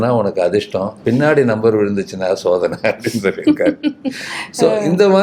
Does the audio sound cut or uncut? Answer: uncut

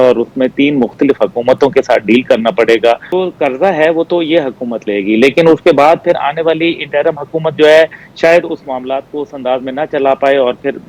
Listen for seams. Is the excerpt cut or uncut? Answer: cut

